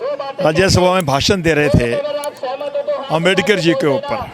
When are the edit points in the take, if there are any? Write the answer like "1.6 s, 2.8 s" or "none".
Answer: none